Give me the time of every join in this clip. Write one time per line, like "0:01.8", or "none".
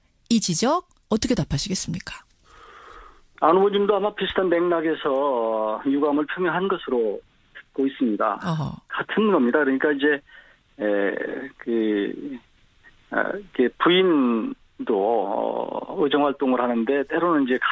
0:05.0